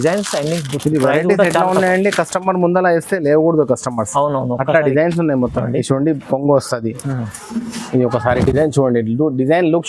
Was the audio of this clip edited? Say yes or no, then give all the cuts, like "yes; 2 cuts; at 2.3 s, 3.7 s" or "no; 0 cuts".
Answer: yes; 1 cut; at 5.6 s